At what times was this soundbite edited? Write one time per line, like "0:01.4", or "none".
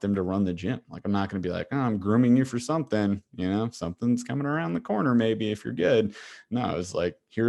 none